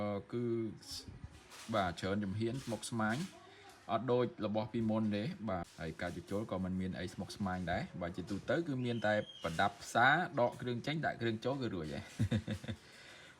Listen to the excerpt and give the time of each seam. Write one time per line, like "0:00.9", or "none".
0:05.8